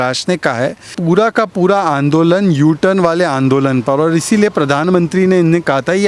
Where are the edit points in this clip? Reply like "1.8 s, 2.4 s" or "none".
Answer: 1.0 s

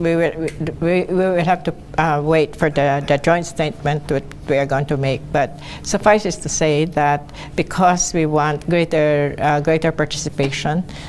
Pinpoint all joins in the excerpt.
9.5 s

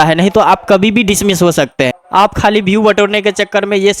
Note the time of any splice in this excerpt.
1.9 s

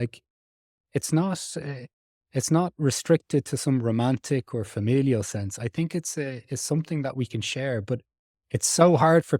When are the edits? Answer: none

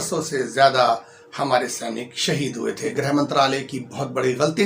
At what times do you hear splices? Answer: 2.9 s

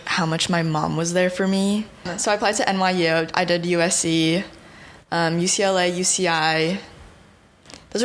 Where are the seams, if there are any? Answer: 2.1 s

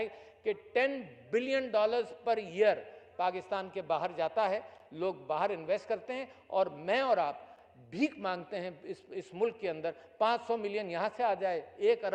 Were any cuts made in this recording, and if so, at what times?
none

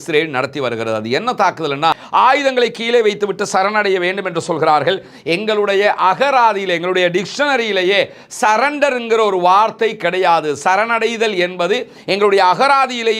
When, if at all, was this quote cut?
2.0 s

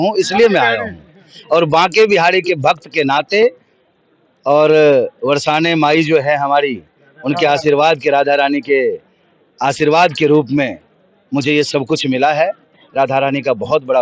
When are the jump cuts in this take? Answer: none

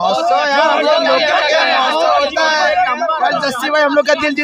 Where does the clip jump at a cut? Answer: none

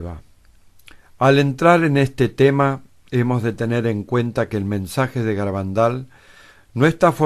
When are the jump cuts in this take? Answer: 1.7 s

